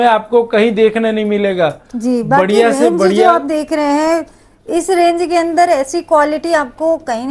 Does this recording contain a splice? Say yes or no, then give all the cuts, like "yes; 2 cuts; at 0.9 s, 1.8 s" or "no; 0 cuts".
no; 0 cuts